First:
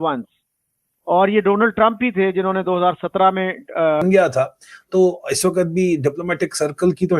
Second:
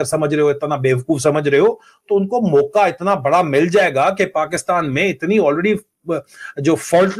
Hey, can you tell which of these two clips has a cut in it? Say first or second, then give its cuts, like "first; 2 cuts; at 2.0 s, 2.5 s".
first; 1 cut; at 4.0 s